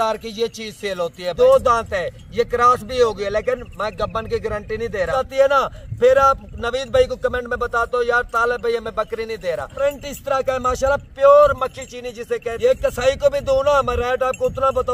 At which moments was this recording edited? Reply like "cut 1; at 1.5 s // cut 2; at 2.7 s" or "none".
cut 1; at 1.2 s // cut 2; at 5.1 s // cut 3; at 9.7 s // cut 4; at 12.5 s

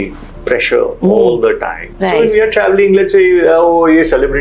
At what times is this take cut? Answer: cut 1; at 1.8 s

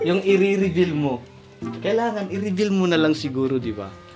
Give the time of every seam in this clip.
none

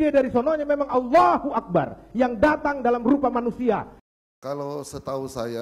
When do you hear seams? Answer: cut 1; at 4.2 s

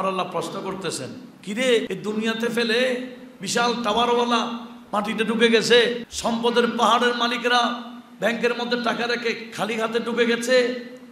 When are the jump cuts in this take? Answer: cut 1; at 1.9 s // cut 2; at 6.1 s

